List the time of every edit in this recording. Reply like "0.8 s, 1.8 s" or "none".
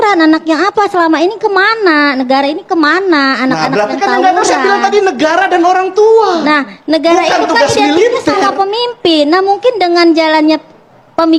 none